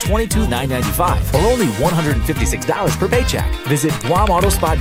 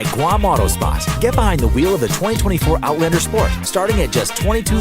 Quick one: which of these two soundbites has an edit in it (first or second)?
second